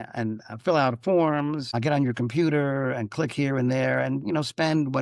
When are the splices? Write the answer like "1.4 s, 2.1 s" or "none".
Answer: none